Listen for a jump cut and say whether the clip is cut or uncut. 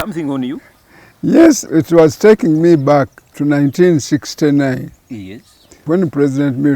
cut